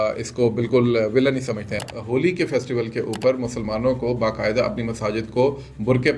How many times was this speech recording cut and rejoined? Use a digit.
1